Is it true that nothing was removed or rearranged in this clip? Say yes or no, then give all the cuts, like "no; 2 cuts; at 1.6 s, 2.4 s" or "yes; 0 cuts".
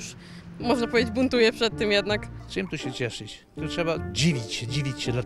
no; 2 cuts; at 2.4 s, 3.6 s